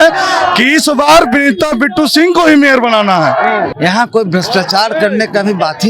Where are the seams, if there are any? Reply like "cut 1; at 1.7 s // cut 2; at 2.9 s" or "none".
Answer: cut 1; at 3.7 s